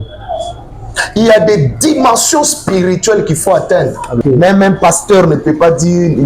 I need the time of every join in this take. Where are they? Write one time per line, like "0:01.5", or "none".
0:04.2